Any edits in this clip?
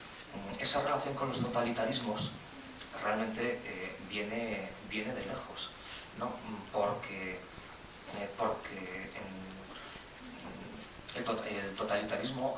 yes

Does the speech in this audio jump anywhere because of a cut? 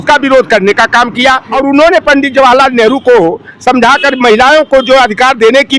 yes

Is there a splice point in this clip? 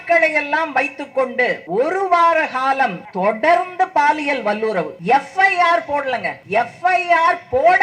yes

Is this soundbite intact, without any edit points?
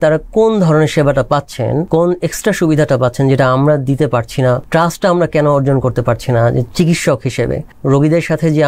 no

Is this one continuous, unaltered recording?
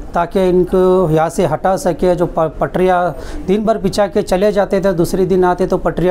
yes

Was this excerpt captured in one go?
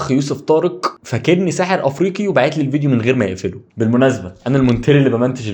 no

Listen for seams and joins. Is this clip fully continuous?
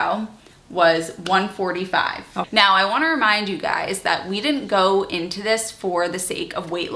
no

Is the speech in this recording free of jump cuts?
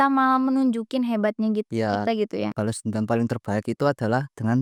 yes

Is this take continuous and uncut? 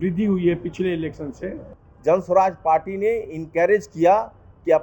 no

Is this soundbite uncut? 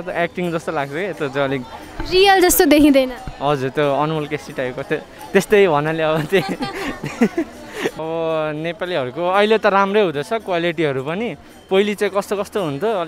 yes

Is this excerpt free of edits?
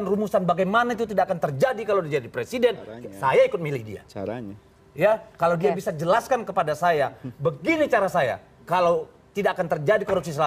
yes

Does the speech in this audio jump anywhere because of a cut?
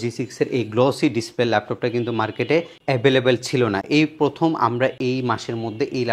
no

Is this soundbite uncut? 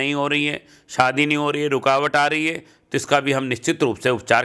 yes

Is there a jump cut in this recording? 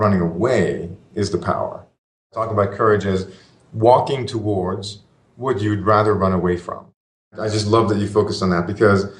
yes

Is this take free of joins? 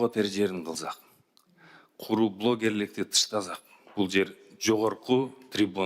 yes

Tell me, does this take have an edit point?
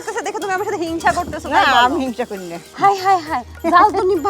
yes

